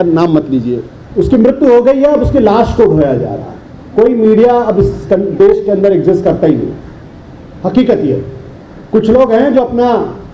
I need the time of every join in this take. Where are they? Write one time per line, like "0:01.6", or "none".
0:00.9